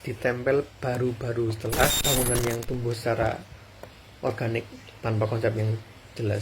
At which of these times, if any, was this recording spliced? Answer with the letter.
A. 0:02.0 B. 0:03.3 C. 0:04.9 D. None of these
A